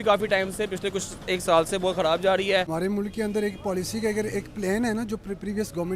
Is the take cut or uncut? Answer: cut